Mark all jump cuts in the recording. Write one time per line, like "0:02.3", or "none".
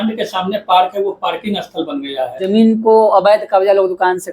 0:02.5

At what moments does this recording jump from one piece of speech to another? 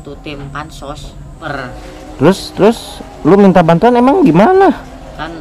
0:01.4

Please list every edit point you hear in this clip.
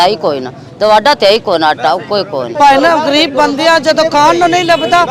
0:02.4

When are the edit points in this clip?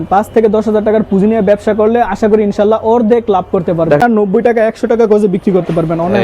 0:04.0

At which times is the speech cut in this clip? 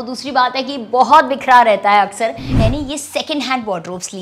0:02.5

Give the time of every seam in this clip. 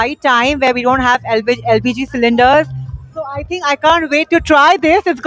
none

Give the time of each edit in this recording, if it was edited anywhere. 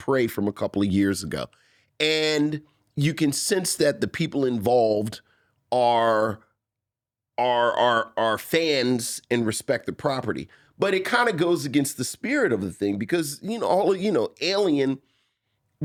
none

